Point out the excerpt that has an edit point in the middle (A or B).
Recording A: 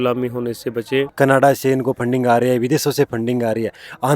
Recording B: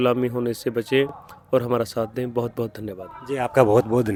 A